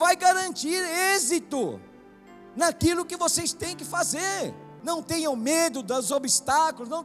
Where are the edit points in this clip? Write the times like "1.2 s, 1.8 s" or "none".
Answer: 4.7 s